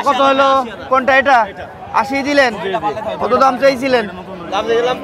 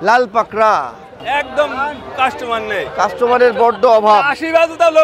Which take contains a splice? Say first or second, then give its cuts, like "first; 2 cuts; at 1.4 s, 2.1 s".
second; 1 cut; at 1.2 s